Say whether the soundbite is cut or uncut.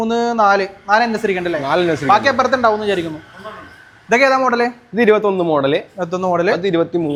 uncut